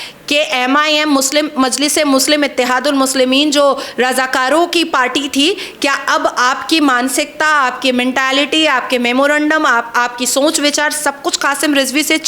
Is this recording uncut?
yes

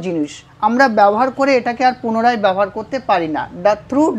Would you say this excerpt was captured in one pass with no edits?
yes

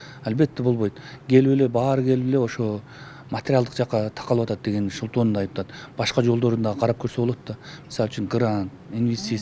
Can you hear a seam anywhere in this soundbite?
no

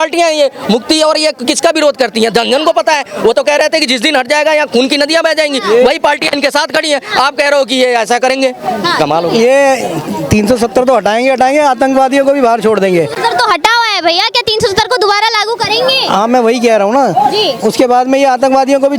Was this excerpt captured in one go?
yes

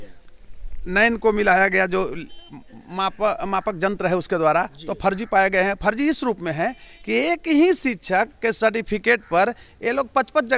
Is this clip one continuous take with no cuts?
yes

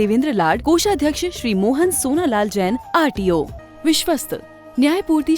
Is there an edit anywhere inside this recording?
yes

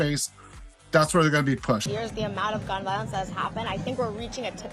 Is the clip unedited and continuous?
no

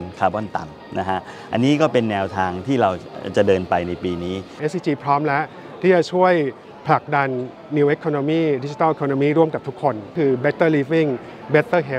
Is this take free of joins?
no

